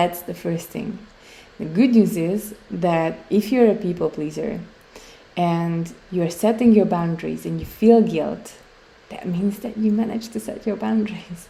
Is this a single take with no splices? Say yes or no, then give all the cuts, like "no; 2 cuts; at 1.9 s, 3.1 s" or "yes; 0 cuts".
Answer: yes; 0 cuts